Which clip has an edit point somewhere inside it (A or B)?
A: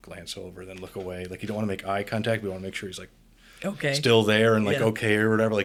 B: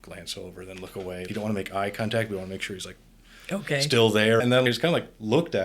B